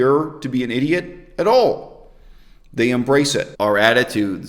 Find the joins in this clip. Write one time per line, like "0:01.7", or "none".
0:03.5